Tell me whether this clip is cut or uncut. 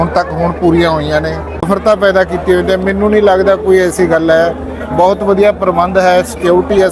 cut